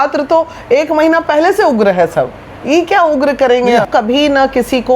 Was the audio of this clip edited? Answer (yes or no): yes